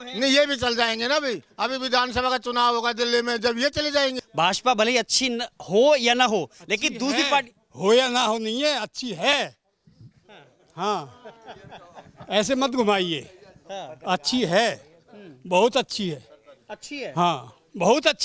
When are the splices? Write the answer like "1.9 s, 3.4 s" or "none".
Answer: none